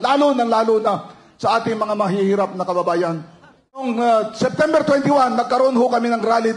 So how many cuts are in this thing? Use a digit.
1